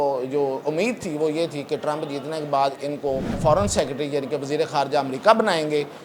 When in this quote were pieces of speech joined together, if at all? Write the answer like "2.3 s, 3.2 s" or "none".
3.4 s